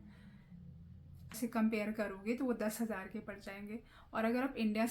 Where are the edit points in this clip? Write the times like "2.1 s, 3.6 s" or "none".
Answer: 1.4 s

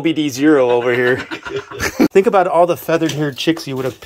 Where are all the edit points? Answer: 2.1 s

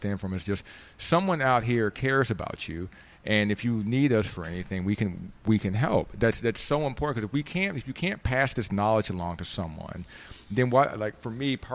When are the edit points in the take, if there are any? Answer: none

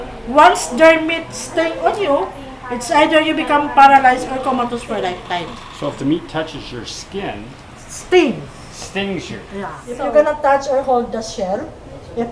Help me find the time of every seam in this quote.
9.8 s

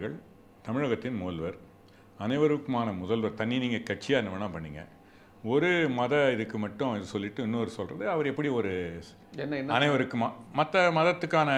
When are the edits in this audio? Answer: none

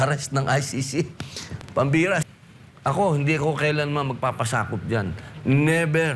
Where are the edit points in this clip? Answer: 2.2 s

